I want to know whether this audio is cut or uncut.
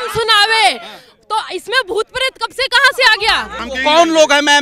cut